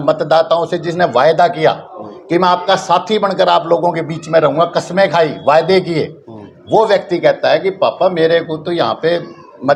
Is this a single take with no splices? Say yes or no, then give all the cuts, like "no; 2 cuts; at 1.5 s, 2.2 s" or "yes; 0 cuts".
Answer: yes; 0 cuts